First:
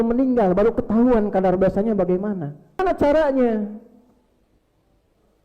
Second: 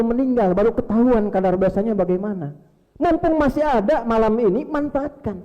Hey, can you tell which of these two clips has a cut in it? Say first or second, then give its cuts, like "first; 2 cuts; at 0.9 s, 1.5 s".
first; 1 cut; at 2.8 s